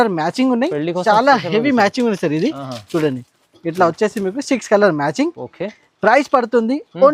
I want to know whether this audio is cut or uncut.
uncut